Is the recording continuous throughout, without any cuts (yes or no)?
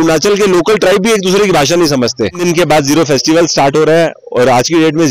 no